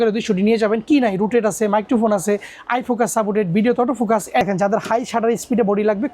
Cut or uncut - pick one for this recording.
cut